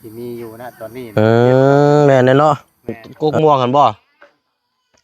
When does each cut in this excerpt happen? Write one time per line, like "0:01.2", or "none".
0:03.0